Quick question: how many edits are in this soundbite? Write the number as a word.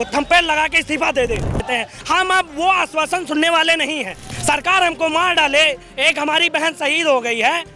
two